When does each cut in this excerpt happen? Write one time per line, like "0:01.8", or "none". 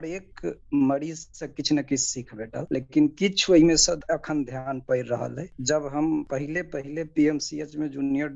0:04.0
0:05.5